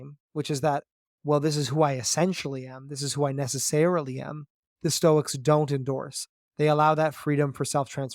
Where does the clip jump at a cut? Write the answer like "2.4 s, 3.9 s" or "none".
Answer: none